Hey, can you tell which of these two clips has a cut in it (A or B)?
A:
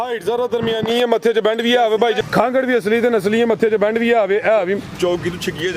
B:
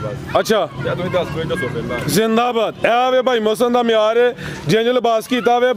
A